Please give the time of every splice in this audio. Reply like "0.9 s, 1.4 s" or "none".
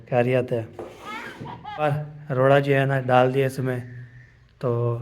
2.1 s